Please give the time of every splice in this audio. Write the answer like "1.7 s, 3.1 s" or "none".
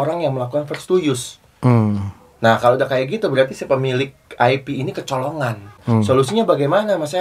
5.8 s